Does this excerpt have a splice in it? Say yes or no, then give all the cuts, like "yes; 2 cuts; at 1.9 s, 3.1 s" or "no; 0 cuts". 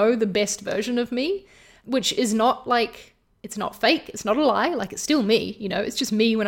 yes; 1 cut; at 1.7 s